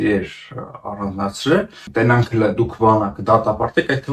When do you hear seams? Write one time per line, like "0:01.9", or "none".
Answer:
0:01.8